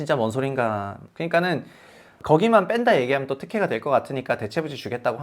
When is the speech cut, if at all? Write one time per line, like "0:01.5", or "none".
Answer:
0:01.0
0:02.2